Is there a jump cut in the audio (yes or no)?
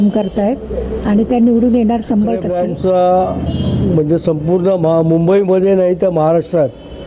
yes